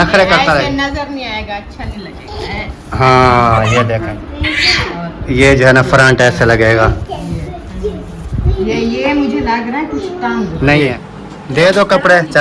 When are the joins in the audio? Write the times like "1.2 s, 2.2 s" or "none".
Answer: 4.1 s, 11.1 s